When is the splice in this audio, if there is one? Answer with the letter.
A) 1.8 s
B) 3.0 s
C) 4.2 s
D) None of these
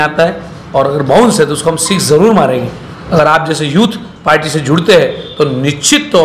B